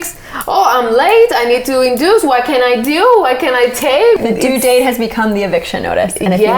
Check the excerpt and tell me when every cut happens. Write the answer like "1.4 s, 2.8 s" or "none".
4.2 s